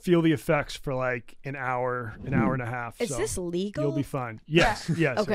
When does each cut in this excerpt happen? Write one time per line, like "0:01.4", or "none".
none

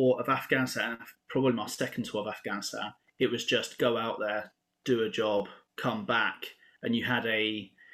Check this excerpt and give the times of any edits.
0:05.6

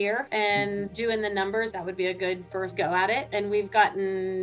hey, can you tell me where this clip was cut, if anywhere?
none

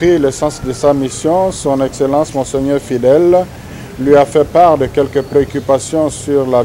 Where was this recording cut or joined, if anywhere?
none

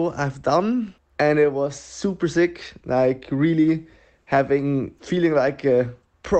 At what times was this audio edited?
0:01.0
0:05.0

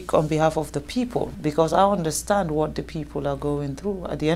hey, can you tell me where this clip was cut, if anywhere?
0:01.3

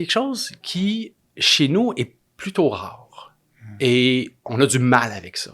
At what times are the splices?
none

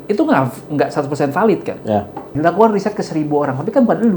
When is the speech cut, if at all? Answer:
0:02.3

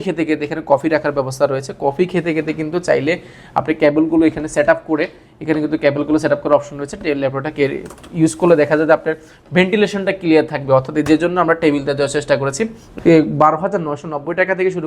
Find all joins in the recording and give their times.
0:12.8

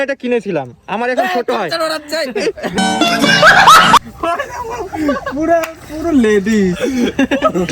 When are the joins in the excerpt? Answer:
0:02.8
0:04.0
0:05.2

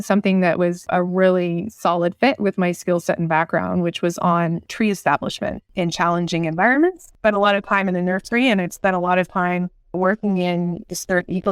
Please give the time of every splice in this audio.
0:04.7

